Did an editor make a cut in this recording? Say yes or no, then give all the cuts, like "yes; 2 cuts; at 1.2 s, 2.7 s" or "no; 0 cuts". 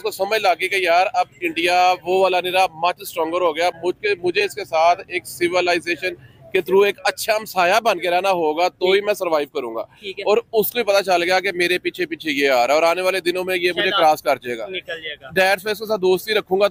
no; 0 cuts